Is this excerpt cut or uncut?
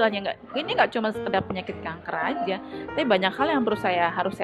uncut